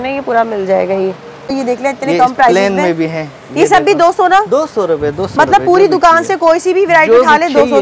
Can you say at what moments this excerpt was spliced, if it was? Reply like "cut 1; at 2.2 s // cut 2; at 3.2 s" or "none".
cut 1; at 1.5 s

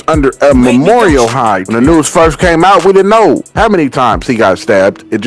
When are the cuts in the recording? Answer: cut 1; at 1.7 s

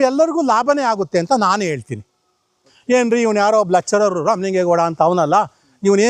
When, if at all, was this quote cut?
cut 1; at 2.6 s

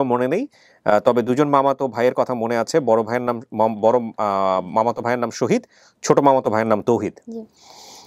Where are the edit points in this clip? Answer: none

